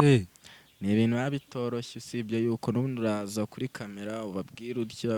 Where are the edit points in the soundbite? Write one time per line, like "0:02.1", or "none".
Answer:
none